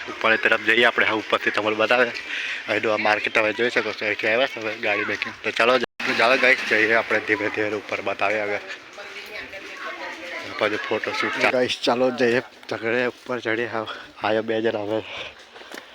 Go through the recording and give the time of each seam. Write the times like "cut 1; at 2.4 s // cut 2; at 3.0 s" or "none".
cut 1; at 5.8 s // cut 2; at 11.2 s